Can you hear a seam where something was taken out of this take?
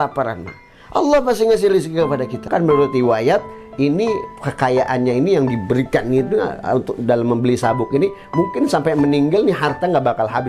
yes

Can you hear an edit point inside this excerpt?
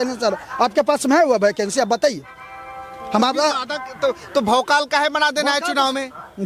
no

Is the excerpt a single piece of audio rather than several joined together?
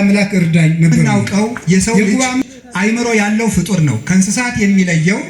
no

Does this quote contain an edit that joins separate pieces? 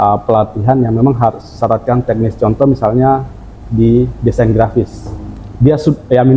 no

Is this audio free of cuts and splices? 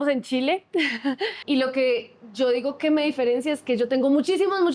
no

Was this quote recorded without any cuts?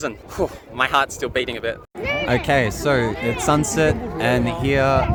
yes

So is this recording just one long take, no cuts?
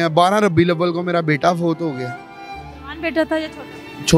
yes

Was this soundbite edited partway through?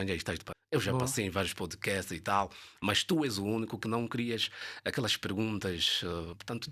no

